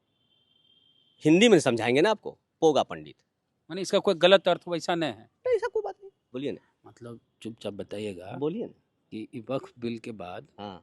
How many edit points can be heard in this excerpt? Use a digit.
1